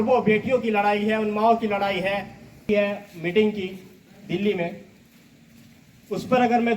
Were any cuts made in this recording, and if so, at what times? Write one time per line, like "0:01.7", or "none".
0:02.7